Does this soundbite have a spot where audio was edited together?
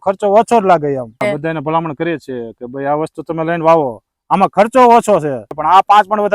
yes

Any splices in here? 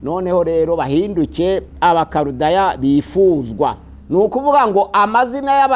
yes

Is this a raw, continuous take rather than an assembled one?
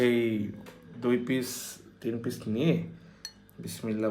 yes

